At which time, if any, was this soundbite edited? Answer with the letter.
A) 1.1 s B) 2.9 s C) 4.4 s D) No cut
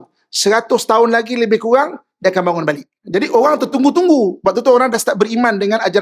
B